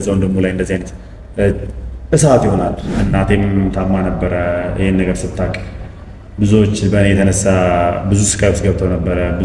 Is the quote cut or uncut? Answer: cut